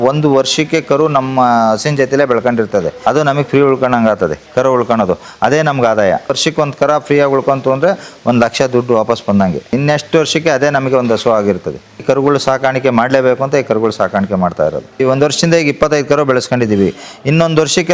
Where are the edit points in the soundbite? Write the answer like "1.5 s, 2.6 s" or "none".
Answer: 2.9 s, 4.4 s, 6.4 s, 9.8 s, 12.0 s, 15.0 s